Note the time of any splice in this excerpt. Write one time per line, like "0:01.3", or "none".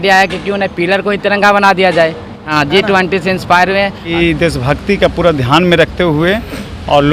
0:02.5
0:04.1